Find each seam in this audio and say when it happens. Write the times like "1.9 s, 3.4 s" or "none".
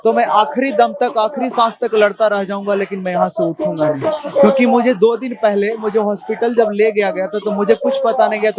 none